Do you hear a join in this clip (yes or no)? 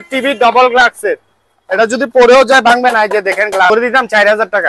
yes